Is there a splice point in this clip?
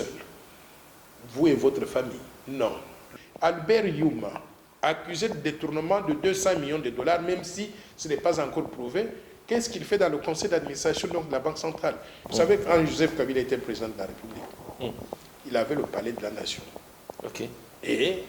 yes; 2 cuts; at 3.0 s, 12.2 s

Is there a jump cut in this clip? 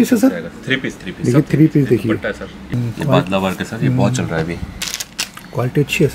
yes; 1 cut; at 2.7 s

